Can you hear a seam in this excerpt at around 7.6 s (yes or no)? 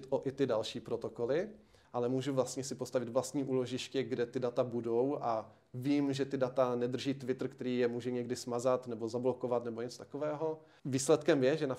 no